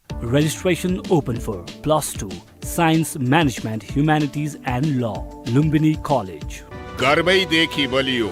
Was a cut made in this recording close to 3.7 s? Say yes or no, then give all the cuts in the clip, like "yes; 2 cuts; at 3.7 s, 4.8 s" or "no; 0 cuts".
no; 0 cuts